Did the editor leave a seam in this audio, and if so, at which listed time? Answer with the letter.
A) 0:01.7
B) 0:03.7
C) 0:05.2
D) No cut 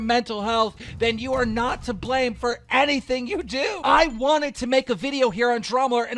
B